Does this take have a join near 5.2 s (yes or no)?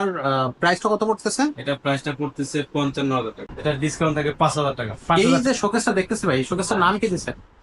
yes